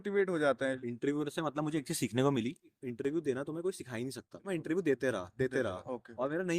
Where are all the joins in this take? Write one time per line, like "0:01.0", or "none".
0:00.8
0:02.7
0:04.3